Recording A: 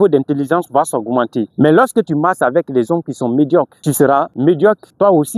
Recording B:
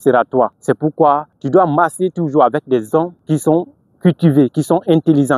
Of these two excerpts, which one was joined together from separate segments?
B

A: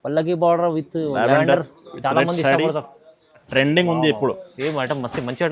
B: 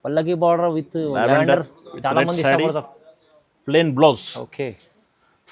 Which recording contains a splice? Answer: A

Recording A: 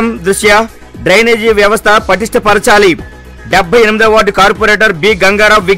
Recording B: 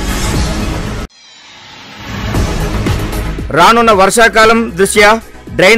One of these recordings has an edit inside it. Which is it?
B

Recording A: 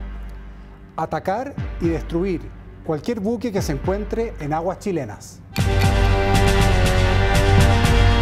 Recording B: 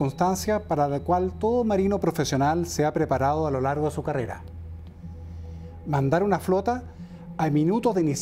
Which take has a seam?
A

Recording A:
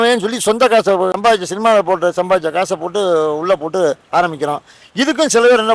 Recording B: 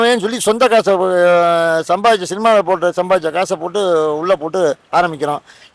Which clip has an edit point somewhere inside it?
A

